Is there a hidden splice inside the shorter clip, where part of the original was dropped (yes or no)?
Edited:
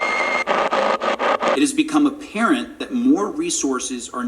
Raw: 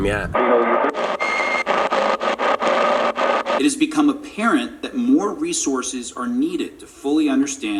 yes